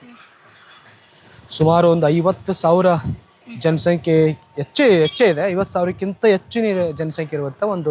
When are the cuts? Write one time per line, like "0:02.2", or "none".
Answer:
none

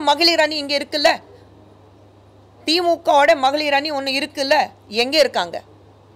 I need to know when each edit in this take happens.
none

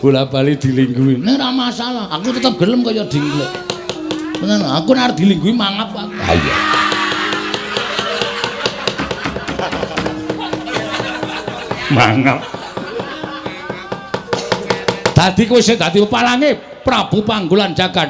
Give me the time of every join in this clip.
none

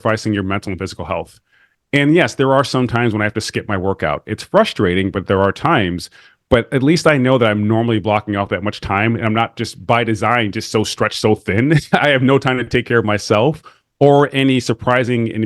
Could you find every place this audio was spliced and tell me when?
0:11.8

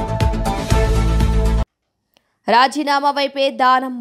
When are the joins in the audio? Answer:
0:01.6

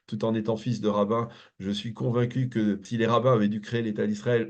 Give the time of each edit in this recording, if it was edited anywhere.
0:02.9

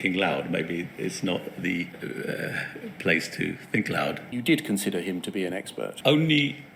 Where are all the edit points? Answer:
0:02.0
0:04.3
0:05.9

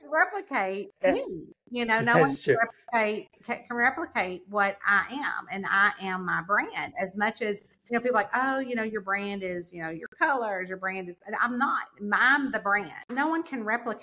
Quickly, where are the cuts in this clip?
0:13.0

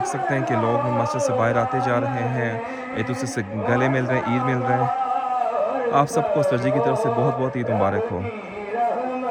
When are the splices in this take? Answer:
none

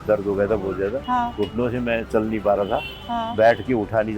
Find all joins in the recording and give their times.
0:01.0

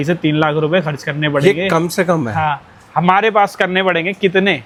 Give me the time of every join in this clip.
none

